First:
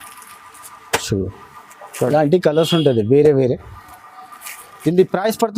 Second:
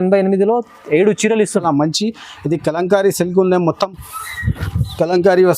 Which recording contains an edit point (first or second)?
second